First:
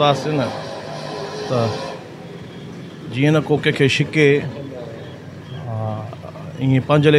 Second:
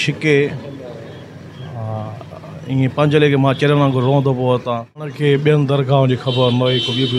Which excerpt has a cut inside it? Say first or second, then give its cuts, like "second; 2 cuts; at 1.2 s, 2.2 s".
second; 1 cut; at 5.1 s